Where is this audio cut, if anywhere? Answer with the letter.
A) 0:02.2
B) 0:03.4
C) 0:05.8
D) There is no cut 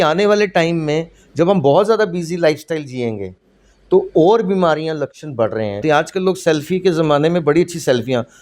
C